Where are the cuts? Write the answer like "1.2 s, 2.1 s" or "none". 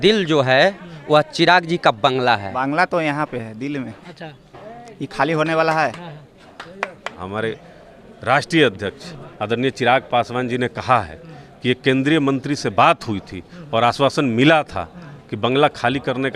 2.5 s, 7.2 s